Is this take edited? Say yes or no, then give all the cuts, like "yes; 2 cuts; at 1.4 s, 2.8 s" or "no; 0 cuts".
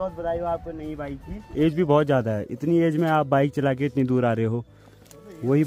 yes; 1 cut; at 1.4 s